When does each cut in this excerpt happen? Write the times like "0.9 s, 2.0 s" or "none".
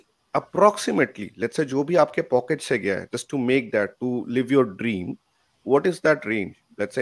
none

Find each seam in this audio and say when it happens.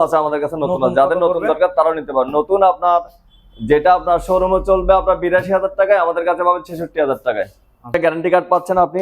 8.0 s

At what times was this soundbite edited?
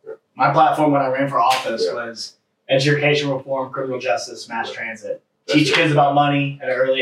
none

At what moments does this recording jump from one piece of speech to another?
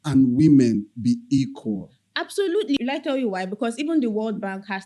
2.8 s

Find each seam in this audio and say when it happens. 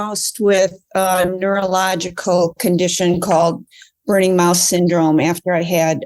none

